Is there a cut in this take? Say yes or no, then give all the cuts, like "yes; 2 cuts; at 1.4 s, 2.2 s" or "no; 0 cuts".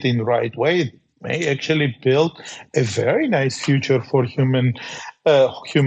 no; 0 cuts